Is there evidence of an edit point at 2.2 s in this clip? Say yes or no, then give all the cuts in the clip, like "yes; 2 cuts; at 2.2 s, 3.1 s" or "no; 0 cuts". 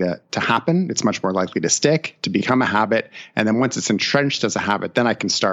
no; 0 cuts